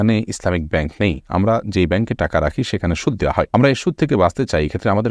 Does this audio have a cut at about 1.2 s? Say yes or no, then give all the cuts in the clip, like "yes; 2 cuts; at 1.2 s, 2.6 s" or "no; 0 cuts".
no; 1 cut; at 3.5 s